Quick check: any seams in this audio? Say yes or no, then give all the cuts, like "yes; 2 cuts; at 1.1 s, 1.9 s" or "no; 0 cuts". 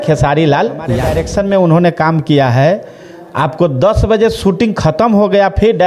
yes; 1 cut; at 1.1 s